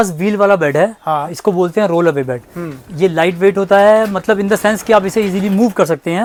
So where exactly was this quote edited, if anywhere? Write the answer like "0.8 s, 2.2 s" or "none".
none